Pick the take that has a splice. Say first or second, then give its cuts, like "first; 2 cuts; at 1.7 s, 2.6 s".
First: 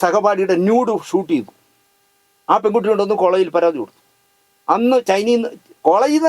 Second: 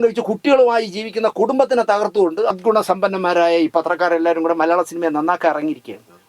second; 1 cut; at 2.5 s